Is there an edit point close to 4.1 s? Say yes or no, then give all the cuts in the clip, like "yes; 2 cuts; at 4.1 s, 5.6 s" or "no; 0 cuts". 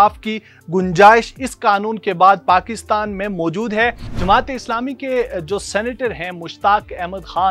yes; 1 cut; at 4.1 s